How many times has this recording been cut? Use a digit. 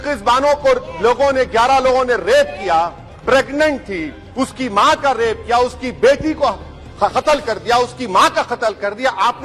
0